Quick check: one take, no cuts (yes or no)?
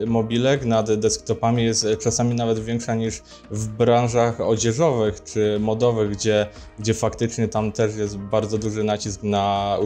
yes